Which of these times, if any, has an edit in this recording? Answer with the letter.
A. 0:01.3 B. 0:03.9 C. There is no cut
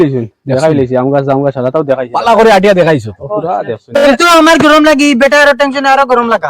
B